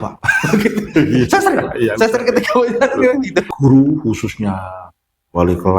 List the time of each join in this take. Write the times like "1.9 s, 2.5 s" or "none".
3.5 s